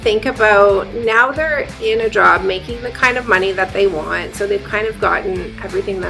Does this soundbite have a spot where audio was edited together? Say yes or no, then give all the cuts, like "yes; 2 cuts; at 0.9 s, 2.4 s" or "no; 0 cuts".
no; 0 cuts